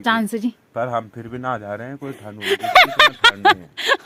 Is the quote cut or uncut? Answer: uncut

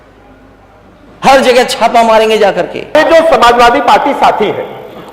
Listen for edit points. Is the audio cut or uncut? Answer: cut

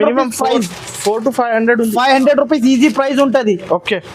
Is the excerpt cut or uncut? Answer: uncut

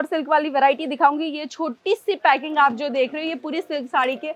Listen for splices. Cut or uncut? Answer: uncut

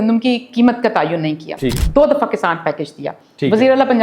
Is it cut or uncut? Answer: cut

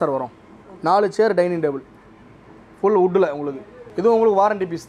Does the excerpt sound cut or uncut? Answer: uncut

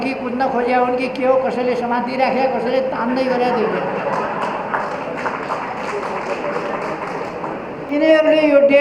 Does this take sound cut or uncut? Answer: cut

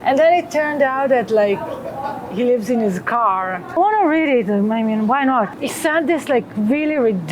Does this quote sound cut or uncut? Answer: cut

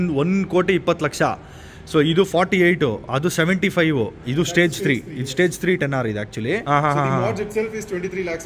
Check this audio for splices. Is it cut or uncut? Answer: cut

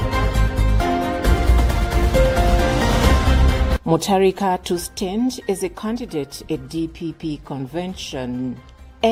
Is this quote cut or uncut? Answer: uncut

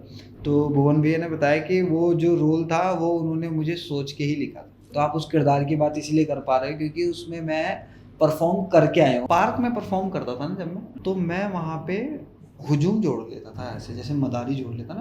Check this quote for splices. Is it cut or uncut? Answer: cut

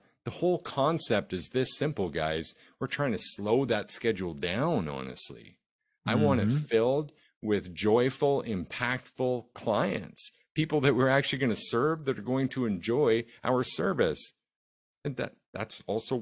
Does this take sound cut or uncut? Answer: uncut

